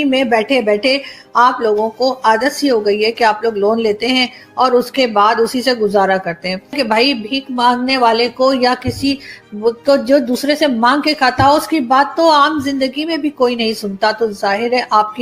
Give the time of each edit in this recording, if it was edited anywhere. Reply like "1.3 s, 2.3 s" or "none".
6.8 s